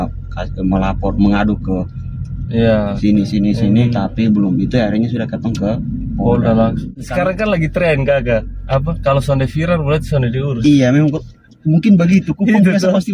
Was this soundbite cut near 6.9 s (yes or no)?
yes